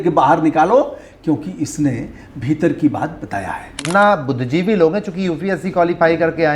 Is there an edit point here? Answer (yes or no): yes